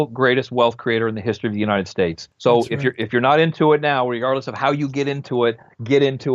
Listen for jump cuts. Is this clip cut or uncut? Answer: cut